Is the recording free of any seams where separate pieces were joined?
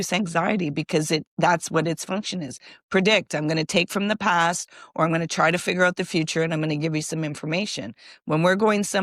yes; 0 cuts

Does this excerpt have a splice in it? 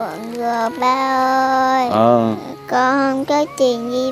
yes; 1 cut; at 2.4 s

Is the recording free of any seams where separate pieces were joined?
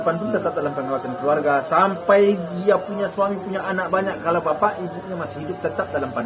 yes; 0 cuts

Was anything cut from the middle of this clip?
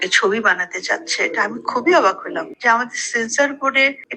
no; 0 cuts

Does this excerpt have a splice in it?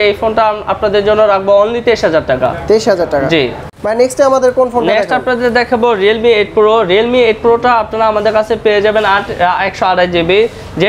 no; 0 cuts

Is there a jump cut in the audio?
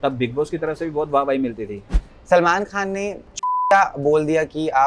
yes; 2 cuts; at 2.1 s, 3.3 s

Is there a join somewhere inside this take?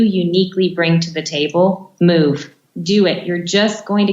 yes; 2 cuts; at 1.9 s, 2.6 s

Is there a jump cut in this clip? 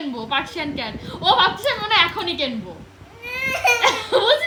no; 0 cuts

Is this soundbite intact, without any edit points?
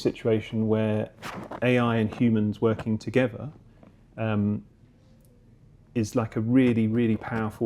yes; 0 cuts

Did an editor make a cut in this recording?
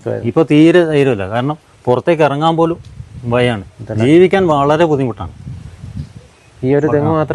no; 0 cuts

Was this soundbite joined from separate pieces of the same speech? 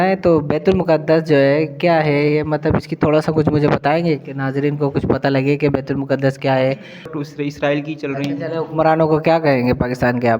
yes; 1 cut; at 7.1 s

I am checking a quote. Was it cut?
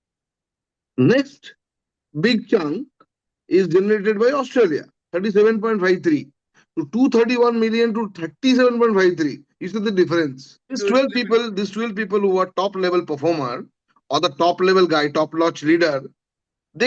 yes; 1 cut; at 10.8 s

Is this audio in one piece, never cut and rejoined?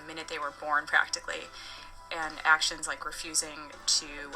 no; 1 cut; at 1.4 s

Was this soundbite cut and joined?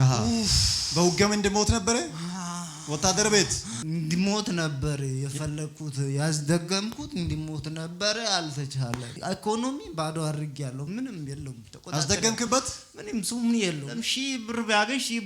yes; 3 cuts; at 3.7 s, 9.1 s, 13.9 s

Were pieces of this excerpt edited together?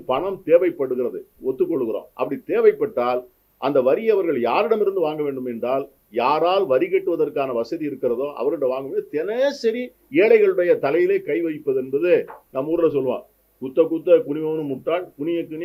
no; 0 cuts

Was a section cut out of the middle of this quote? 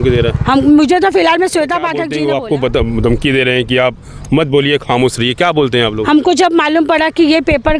yes; 1 cut; at 2.1 s

